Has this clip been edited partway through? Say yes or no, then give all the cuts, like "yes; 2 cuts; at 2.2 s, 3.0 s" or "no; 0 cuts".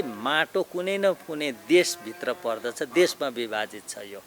no; 0 cuts